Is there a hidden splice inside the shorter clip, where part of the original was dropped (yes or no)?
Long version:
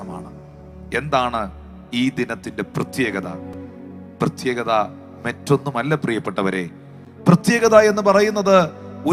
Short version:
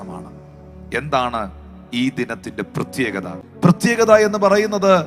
yes